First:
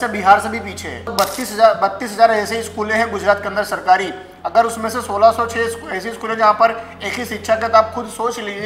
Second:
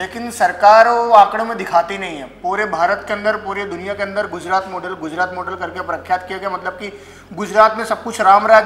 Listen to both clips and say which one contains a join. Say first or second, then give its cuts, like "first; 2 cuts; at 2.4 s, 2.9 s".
first; 1 cut; at 1.1 s